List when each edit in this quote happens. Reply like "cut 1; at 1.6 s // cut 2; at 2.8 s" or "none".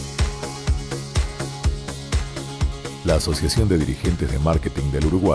cut 1; at 2.6 s